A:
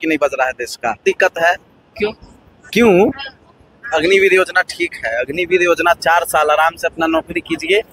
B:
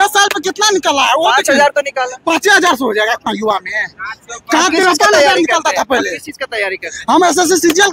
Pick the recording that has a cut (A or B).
A